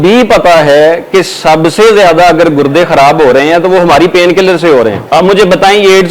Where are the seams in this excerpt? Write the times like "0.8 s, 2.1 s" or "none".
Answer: 5.0 s